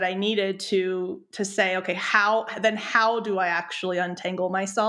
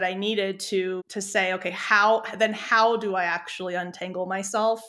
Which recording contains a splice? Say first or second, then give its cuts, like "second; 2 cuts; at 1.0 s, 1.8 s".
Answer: second; 1 cut; at 1.1 s